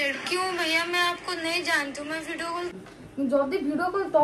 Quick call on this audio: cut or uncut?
cut